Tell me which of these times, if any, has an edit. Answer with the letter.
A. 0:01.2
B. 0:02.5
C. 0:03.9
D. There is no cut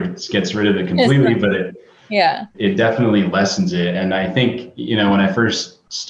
B